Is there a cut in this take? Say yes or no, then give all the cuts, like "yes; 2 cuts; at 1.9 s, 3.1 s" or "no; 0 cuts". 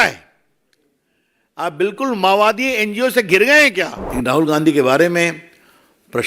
yes; 1 cut; at 4.0 s